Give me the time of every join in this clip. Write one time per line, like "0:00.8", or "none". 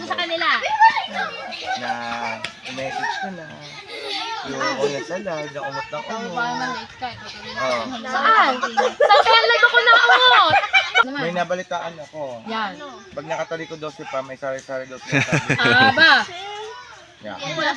0:11.1